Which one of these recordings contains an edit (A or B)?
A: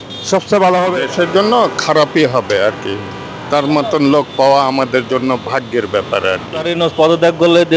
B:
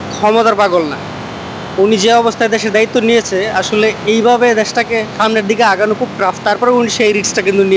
A